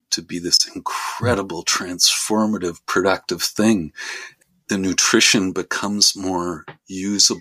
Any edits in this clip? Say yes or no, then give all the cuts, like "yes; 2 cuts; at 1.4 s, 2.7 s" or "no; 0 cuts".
yes; 1 cut; at 4.3 s